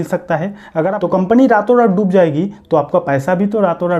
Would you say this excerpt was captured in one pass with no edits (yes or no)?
no